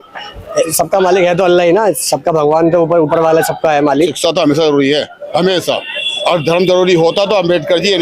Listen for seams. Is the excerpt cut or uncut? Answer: cut